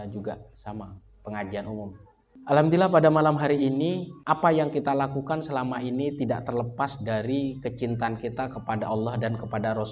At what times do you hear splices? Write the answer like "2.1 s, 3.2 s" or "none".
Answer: none